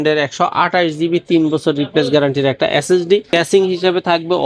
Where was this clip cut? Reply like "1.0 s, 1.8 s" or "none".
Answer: none